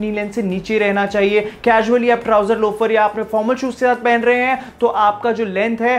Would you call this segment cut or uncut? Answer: uncut